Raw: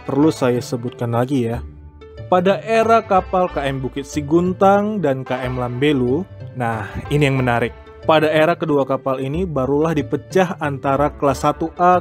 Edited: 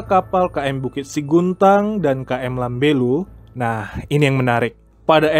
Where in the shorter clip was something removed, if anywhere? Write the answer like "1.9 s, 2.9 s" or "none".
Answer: none